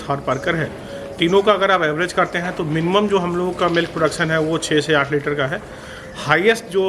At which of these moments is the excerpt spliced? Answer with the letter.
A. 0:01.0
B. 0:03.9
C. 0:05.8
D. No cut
D